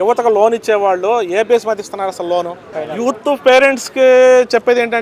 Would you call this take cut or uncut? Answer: cut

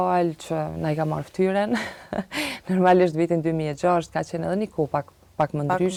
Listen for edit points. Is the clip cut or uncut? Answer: uncut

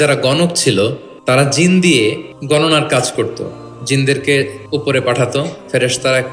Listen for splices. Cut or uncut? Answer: cut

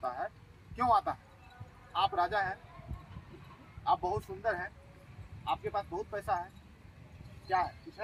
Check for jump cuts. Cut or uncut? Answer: uncut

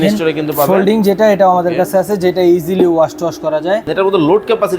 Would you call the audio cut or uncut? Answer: cut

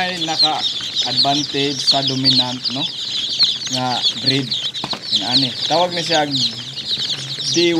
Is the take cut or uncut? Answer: uncut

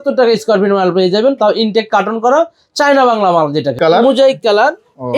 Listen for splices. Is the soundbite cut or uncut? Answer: cut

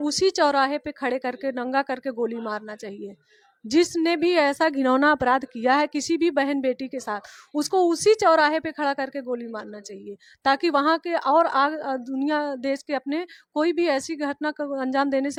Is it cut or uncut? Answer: uncut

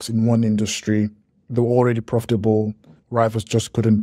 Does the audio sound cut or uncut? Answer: cut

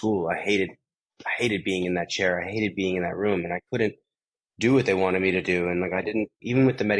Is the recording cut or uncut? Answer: uncut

